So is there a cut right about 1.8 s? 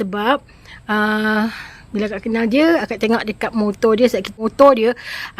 no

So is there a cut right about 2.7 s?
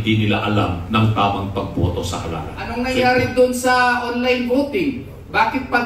yes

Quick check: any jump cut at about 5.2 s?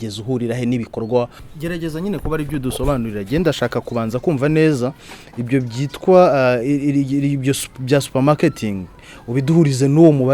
no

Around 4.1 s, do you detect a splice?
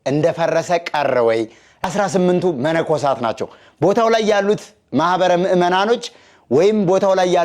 no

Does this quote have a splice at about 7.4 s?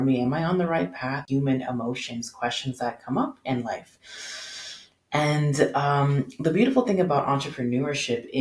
no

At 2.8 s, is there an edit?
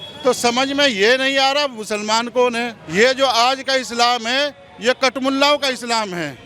yes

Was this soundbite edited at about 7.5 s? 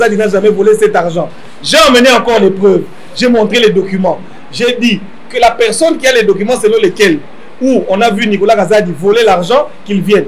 no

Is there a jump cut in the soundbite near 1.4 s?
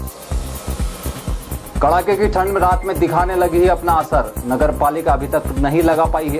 yes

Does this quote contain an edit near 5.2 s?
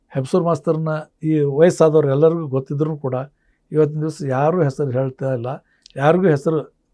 no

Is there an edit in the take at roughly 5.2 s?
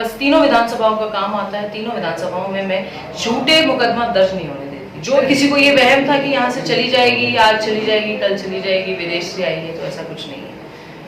yes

